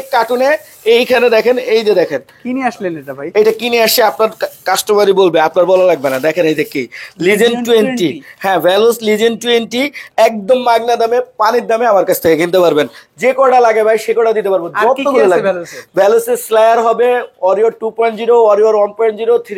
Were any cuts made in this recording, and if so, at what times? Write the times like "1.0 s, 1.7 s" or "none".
none